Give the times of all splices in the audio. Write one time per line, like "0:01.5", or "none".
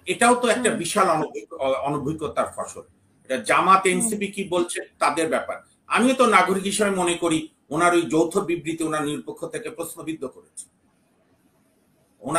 none

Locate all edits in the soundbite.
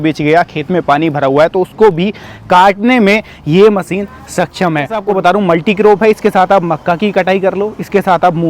0:05.0

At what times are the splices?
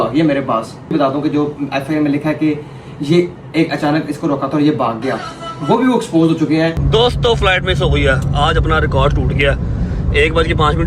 0:00.9
0:06.8

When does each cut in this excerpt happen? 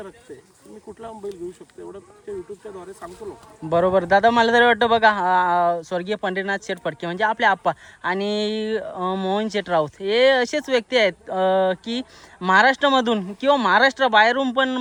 none

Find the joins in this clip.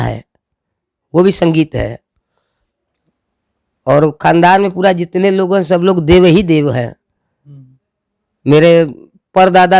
none

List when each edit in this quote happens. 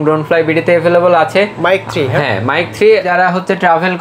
0:03.1

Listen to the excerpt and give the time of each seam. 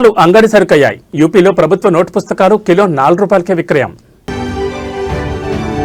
none

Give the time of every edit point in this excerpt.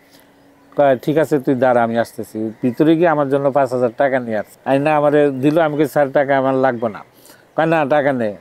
0:04.5

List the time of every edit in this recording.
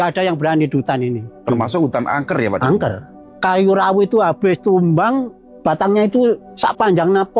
0:03.2
0:05.5
0:06.5

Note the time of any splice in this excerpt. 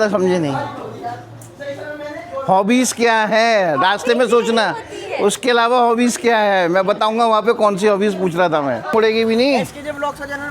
0:08.9

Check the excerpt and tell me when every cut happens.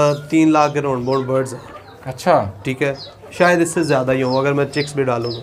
none

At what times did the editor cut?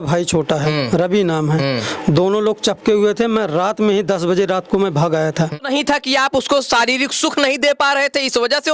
0:05.6

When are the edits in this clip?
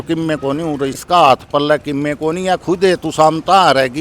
0:01.0

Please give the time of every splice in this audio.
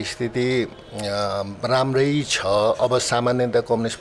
none

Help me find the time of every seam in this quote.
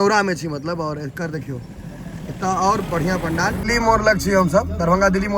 0:03.6

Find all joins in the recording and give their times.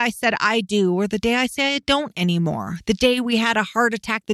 none

